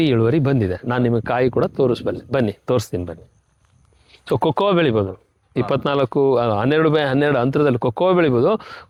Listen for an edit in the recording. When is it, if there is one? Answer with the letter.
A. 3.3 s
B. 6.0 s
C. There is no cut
C